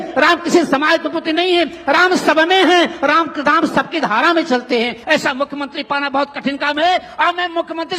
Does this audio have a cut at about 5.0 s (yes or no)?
yes